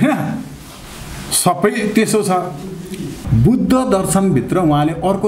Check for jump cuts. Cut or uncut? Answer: cut